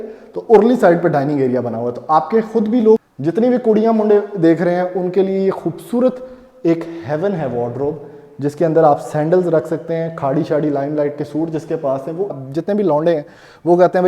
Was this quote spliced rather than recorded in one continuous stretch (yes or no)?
yes